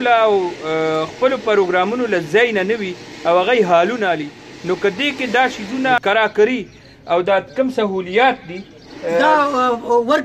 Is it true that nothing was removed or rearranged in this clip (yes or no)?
no